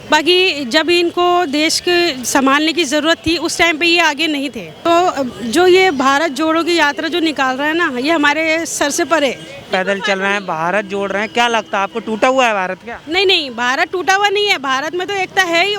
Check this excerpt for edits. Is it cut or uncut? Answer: cut